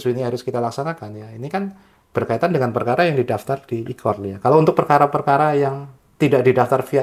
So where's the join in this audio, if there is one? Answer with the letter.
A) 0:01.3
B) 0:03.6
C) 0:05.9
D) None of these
D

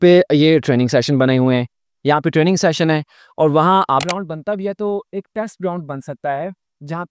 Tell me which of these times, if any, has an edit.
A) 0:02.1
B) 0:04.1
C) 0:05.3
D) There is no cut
B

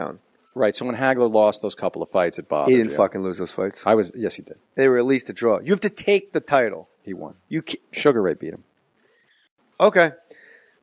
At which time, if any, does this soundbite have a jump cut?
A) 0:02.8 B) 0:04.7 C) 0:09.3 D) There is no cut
A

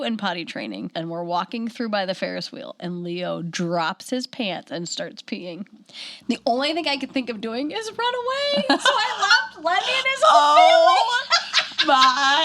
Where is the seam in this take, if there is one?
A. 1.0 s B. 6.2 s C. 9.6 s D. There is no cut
A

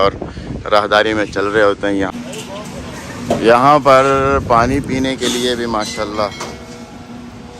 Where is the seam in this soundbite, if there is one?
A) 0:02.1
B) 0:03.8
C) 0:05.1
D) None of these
A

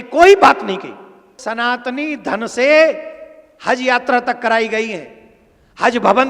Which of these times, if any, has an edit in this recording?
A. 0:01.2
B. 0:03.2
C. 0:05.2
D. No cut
A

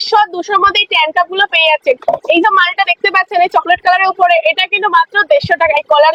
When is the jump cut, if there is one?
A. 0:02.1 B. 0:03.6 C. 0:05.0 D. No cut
D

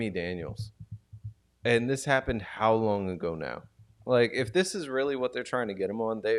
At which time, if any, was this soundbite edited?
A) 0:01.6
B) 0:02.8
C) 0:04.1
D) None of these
D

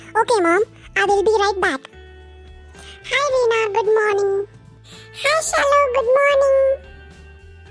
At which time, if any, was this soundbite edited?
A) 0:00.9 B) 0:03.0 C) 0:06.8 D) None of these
C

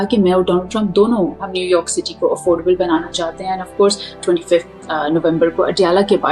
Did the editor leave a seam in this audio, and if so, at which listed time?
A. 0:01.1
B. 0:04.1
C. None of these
B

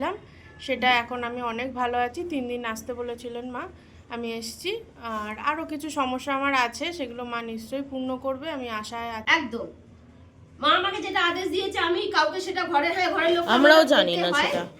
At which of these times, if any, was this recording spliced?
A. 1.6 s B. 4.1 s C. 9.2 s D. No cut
C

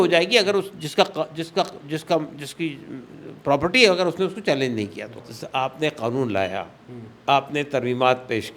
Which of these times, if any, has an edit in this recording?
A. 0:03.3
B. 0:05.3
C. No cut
B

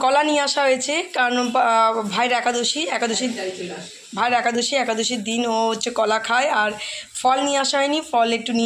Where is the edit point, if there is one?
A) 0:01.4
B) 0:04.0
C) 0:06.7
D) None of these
D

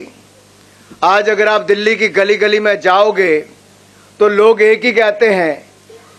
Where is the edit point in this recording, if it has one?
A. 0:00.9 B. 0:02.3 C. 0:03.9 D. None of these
D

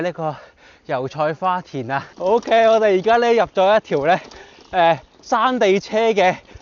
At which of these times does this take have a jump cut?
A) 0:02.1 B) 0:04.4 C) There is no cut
A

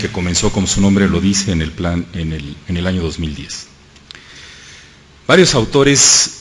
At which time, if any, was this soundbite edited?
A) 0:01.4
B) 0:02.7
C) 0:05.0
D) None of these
C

